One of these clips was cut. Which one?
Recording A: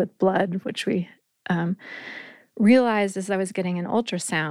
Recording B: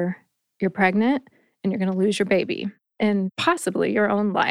B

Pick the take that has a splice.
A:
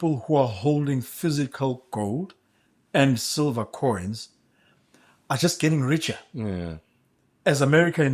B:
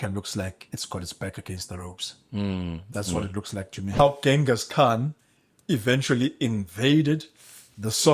B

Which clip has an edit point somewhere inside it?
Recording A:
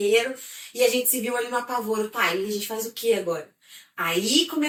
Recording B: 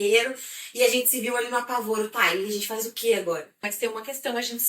B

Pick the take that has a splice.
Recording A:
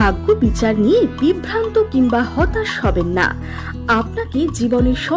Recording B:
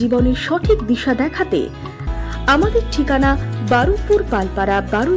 B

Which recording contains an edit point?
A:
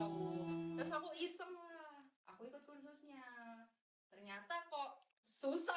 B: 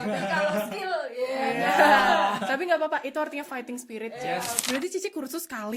B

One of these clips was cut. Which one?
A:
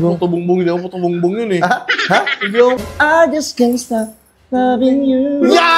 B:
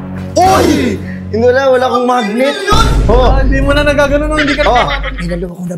A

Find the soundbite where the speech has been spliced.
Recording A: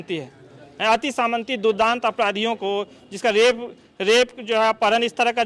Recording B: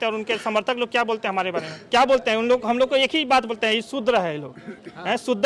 B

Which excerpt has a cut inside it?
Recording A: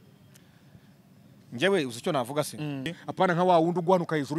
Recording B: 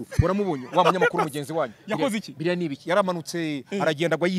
A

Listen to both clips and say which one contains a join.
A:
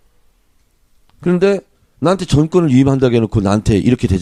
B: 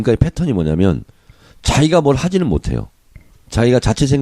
B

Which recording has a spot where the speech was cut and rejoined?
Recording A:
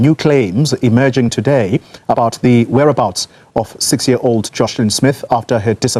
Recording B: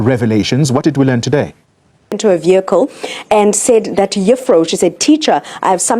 B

